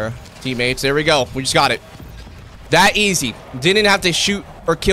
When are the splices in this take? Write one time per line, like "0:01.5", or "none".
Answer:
none